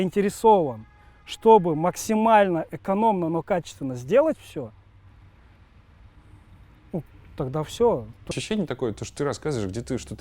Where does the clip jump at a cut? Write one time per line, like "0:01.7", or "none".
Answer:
0:08.3